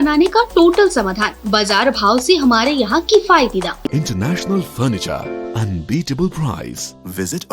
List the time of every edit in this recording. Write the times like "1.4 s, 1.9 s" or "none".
3.9 s